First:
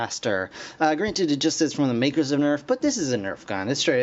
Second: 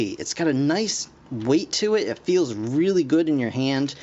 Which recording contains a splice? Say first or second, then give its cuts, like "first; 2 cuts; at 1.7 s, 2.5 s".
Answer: second; 1 cut; at 2.7 s